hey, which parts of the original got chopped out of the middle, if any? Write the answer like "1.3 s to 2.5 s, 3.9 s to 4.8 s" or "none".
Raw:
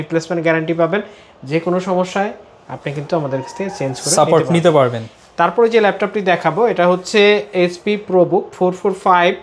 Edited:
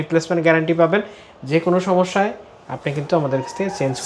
none